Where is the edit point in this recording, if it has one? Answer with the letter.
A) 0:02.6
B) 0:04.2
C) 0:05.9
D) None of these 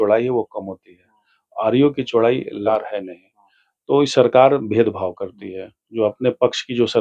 A